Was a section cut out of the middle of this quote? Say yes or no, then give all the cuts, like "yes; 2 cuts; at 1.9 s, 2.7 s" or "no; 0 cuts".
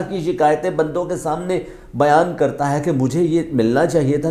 no; 0 cuts